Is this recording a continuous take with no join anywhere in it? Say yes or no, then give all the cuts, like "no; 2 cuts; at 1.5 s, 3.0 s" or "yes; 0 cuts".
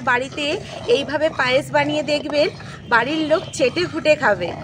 yes; 0 cuts